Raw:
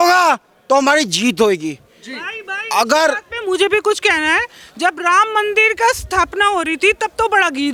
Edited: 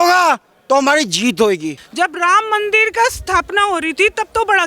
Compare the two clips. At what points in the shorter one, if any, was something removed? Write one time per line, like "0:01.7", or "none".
0:01.8

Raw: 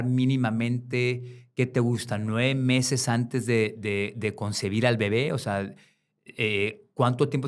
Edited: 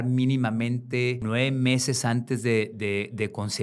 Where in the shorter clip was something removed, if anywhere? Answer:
0:01.2

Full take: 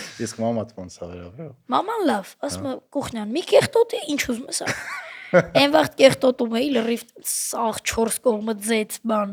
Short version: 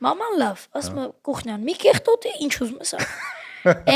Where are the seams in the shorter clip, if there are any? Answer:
none

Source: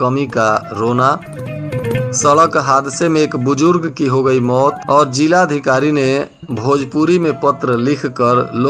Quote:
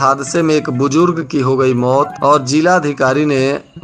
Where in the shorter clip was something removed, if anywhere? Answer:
none

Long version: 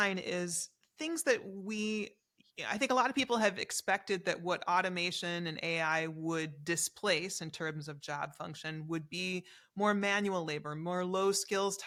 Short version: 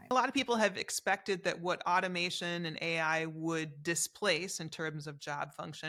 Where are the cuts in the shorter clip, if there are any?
none

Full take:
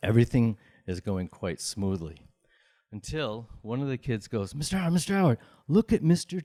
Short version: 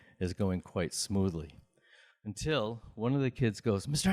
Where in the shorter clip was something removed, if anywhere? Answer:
none

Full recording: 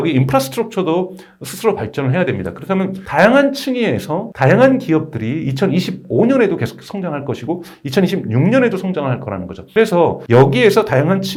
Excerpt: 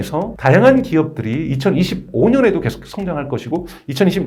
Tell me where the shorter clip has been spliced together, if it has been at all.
none

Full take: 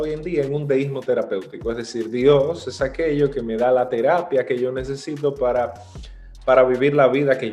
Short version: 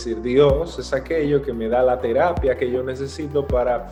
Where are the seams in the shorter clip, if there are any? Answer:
none

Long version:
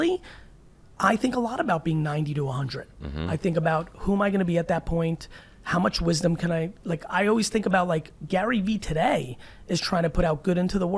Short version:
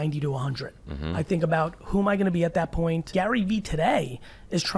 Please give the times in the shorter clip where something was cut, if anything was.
0:03.0

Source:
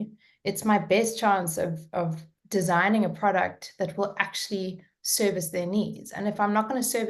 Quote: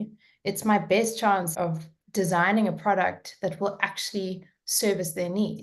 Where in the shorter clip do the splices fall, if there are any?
0:01.5

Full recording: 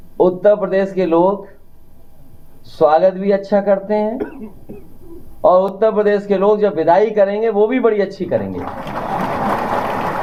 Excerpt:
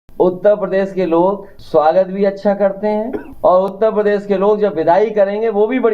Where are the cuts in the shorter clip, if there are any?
0:01.5
0:03.2

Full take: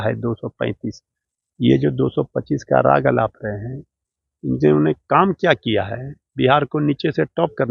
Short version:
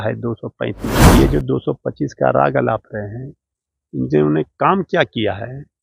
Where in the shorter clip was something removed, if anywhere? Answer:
0:01.0

